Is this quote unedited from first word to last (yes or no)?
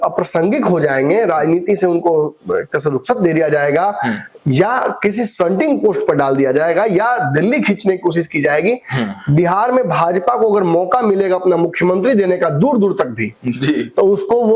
yes